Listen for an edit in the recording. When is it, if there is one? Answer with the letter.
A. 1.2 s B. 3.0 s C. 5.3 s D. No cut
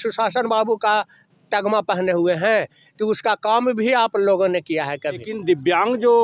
C